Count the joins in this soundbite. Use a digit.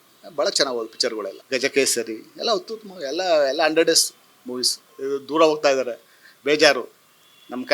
2